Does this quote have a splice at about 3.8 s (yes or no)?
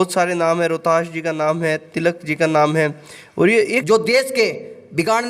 yes